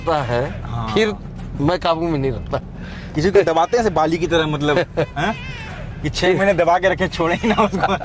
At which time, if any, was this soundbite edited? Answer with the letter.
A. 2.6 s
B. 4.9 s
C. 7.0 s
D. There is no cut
A